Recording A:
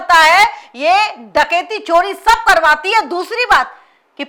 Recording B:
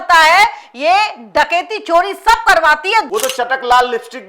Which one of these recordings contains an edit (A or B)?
B